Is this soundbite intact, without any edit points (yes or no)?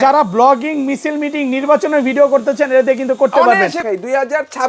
no